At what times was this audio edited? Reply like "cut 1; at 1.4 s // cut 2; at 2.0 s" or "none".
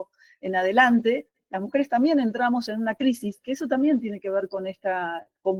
none